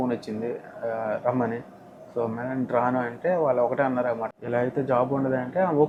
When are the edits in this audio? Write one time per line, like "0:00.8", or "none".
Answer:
none